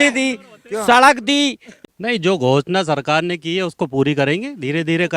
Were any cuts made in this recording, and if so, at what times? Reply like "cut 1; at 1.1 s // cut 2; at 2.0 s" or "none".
cut 1; at 1.7 s